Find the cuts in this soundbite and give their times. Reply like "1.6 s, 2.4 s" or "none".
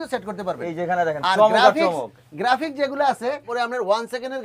3.5 s